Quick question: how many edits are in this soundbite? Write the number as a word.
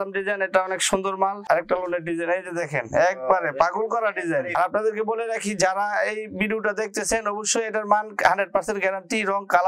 two